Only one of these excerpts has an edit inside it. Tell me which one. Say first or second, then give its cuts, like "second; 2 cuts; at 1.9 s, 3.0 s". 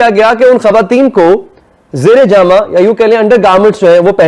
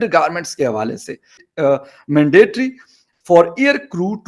second; 1 cut; at 1.4 s